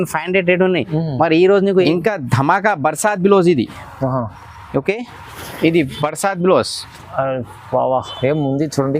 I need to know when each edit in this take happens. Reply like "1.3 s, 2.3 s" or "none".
1.9 s